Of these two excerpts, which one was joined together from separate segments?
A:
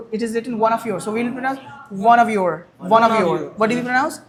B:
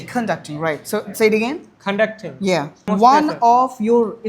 B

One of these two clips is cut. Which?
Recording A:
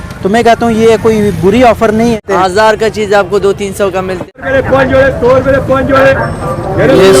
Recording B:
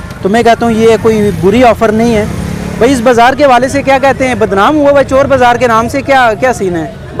A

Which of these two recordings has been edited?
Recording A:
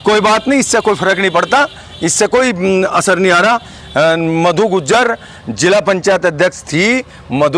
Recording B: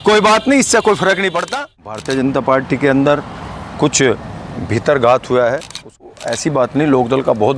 B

